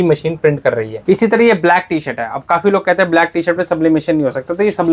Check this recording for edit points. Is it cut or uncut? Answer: cut